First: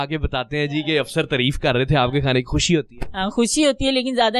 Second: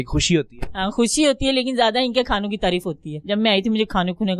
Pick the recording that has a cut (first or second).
second